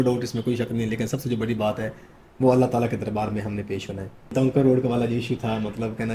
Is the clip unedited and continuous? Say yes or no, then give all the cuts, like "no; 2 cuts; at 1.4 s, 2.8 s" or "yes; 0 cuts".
no; 1 cut; at 4.3 s